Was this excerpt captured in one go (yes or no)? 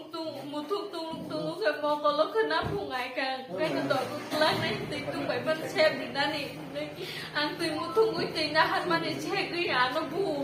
yes